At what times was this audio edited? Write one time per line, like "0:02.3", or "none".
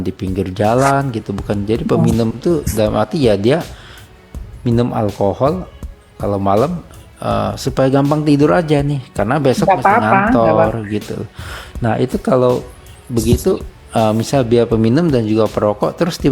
none